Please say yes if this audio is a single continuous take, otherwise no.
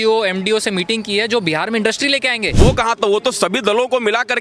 no